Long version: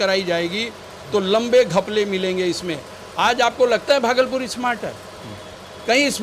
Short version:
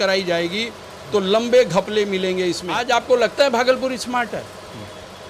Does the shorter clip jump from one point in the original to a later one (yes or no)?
yes